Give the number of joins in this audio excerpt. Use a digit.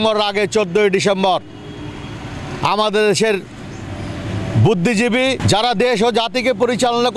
1